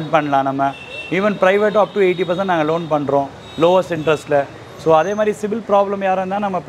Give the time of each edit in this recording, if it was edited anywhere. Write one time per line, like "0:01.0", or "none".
none